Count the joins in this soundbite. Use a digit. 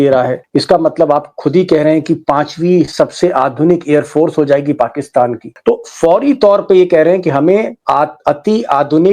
1